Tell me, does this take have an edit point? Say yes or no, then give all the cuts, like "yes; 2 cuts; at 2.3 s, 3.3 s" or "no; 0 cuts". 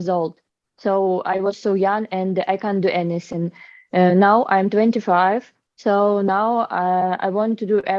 no; 0 cuts